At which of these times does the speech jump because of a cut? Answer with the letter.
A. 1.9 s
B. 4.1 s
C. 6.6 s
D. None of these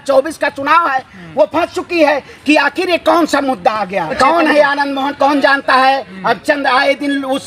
B